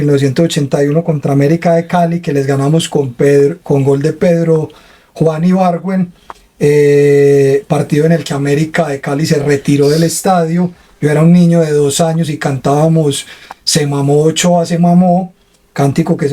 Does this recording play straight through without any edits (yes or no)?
yes